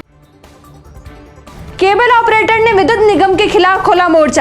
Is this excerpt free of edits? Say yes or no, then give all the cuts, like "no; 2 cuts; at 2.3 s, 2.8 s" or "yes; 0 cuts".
no; 1 cut; at 1.4 s